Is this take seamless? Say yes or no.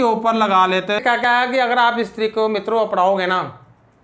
no